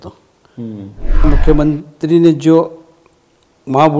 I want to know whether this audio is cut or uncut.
cut